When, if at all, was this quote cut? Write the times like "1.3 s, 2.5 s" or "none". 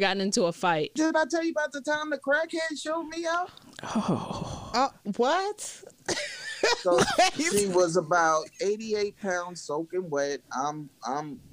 0.9 s